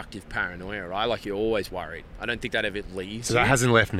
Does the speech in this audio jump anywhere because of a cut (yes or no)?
no